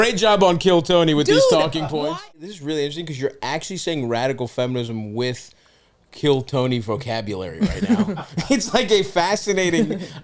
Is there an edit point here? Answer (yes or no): yes